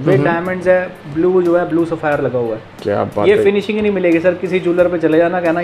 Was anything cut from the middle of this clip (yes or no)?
no